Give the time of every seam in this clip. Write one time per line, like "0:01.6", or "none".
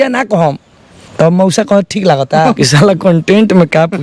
0:02.5